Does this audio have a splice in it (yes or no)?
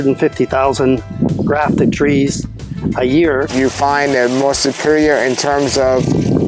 yes